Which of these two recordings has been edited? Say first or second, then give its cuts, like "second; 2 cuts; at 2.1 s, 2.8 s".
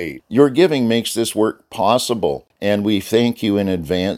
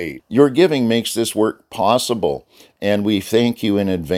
first; 1 cut; at 2.5 s